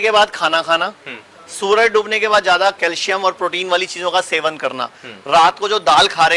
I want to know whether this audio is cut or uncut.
uncut